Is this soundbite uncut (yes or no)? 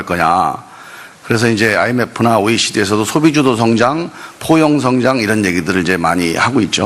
no